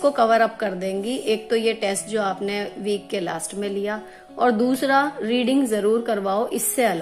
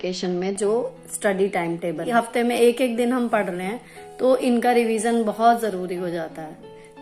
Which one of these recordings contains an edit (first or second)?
second